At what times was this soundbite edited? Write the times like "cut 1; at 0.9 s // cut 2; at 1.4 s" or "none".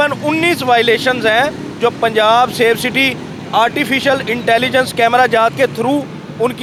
none